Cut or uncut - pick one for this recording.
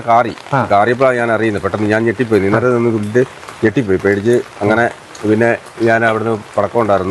uncut